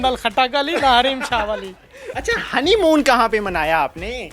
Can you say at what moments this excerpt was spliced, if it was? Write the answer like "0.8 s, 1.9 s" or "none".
2.1 s